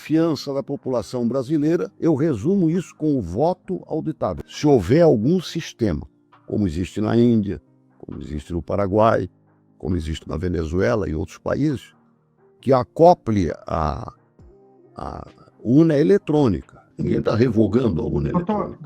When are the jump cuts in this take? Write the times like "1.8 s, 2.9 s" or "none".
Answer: 1.9 s, 4.4 s